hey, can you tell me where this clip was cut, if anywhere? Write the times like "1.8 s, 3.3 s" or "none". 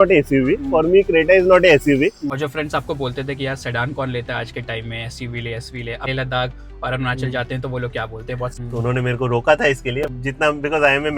2.3 s, 6.1 s, 8.6 s